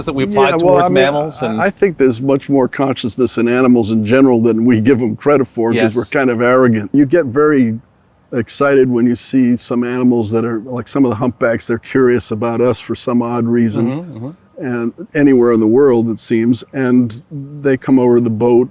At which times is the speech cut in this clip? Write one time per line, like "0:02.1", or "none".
0:06.9